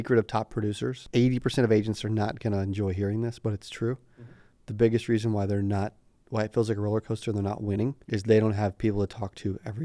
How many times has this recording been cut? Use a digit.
2